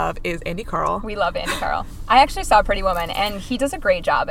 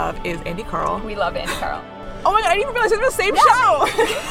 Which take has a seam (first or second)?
second